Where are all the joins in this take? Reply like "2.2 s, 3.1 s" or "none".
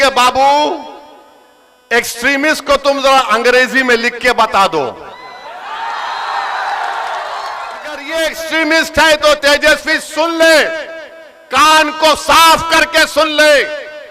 8.0 s

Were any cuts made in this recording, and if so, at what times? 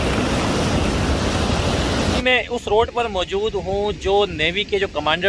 2.2 s

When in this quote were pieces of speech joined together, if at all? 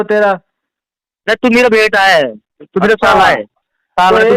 none

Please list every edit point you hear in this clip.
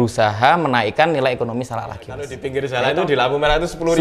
2.4 s

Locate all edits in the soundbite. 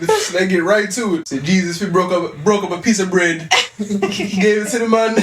1.2 s

